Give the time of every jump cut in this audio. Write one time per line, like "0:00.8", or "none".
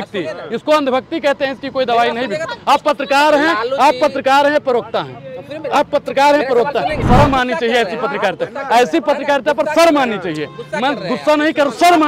0:07.0